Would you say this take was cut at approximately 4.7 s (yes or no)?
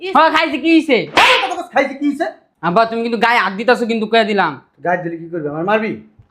no